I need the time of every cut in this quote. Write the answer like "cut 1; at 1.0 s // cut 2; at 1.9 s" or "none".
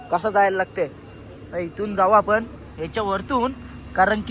none